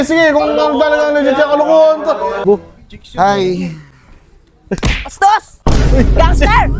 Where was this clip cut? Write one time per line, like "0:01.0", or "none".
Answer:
0:02.4